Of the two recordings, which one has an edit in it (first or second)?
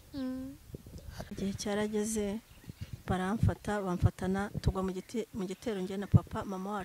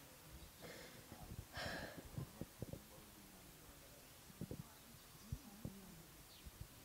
first